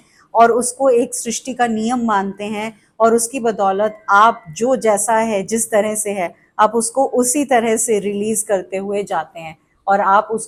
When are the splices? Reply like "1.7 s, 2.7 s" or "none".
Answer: none